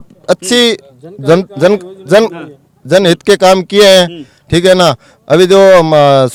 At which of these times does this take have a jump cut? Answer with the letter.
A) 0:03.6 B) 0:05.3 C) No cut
C